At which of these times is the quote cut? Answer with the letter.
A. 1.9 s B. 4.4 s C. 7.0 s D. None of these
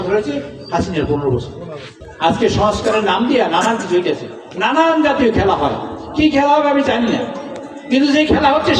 D